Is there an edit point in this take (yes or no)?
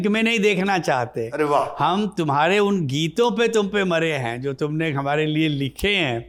no